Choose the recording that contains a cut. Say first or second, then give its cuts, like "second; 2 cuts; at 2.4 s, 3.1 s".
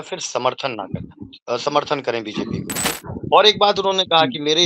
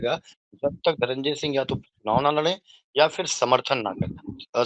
first; 1 cut; at 2.9 s